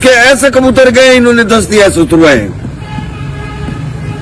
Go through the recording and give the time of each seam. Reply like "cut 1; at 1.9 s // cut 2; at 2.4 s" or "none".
none